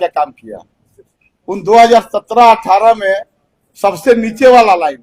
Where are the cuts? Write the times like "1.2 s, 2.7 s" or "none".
none